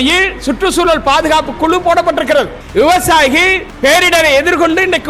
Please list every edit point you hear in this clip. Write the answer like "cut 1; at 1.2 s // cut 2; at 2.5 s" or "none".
cut 1; at 2.6 s // cut 2; at 3.6 s